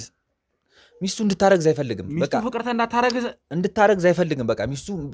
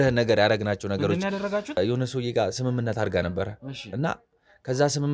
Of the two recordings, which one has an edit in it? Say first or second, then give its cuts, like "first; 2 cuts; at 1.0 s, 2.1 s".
second; 1 cut; at 1.8 s